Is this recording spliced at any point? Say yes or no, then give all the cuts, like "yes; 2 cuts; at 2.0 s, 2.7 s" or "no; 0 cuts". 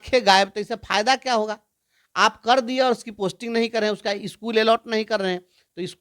no; 0 cuts